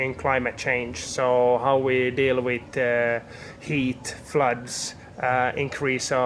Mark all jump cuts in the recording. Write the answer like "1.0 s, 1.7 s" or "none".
none

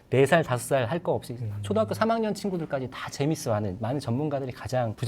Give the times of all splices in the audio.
3.8 s

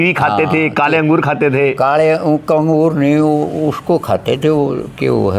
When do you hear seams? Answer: none

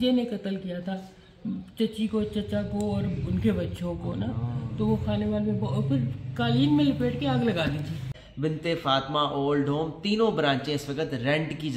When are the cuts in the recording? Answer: 8.1 s

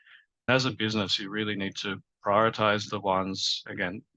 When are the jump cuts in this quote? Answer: none

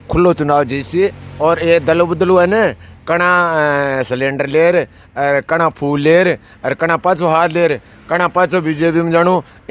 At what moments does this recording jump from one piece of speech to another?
none

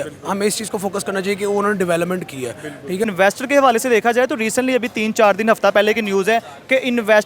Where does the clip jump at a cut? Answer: 3.1 s

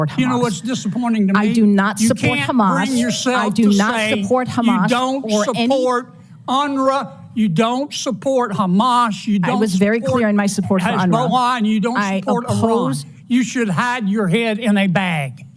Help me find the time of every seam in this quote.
none

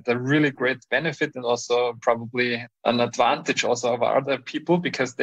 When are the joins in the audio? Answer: 2.8 s

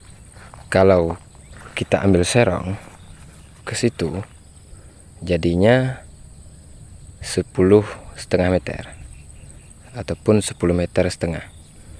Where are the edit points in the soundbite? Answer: none

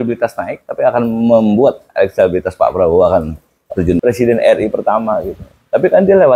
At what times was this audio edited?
4.0 s

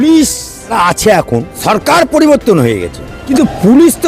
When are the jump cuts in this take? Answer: 0.7 s, 1.5 s, 3.2 s

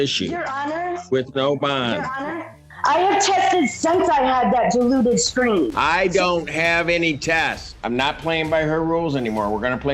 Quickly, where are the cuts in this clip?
2.7 s, 7.7 s

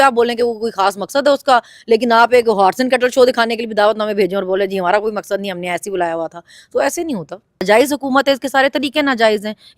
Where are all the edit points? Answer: 7.6 s

